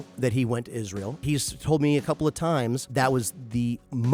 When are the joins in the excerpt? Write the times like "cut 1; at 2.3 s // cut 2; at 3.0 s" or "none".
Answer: cut 1; at 1.2 s // cut 2; at 2.8 s